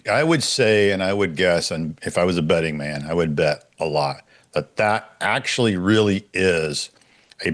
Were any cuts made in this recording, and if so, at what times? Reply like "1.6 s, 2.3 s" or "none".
none